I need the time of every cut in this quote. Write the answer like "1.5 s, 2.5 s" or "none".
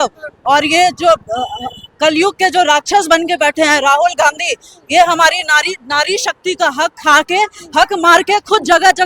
none